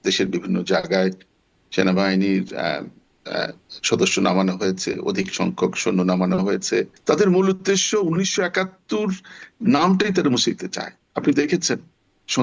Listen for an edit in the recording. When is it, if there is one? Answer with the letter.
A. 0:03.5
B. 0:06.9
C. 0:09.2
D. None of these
B